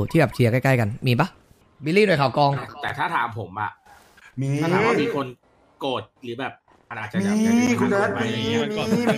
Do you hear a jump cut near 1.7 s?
yes; 1 cut; at 1.7 s

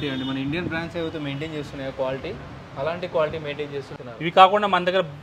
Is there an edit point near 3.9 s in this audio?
yes; 1 cut; at 3.9 s

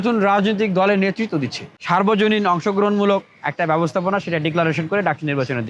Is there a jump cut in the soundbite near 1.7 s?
yes; 1 cut; at 1.7 s

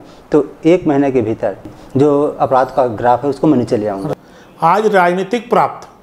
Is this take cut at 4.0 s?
yes; 2 cuts; at 1.6 s, 4.0 s

